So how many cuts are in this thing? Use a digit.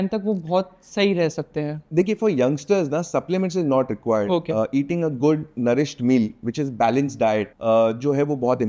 1